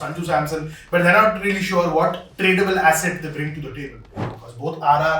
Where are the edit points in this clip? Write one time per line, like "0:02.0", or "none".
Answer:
0:04.3